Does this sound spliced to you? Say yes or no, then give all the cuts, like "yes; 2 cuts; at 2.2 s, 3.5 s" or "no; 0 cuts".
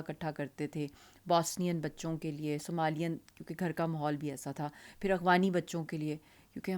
no; 0 cuts